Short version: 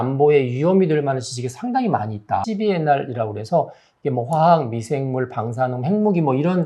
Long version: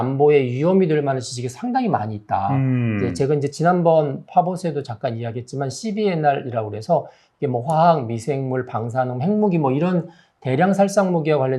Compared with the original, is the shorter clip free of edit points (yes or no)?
no